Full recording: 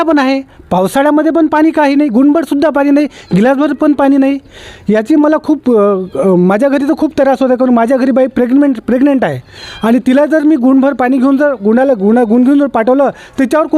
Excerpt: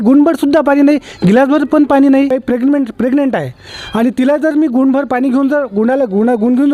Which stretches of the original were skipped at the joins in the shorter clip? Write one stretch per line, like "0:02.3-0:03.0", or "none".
0:04.4-0:08.2